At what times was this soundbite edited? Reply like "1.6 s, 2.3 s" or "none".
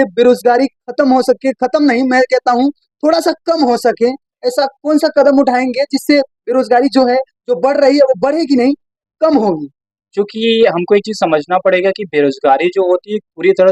none